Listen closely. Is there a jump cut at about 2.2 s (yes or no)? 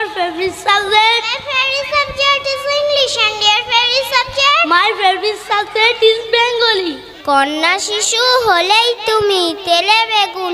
no